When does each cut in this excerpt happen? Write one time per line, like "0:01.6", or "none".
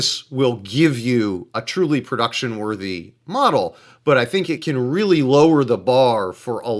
none